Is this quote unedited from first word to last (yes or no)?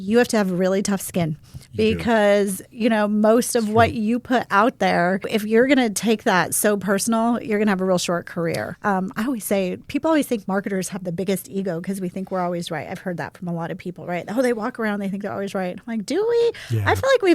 no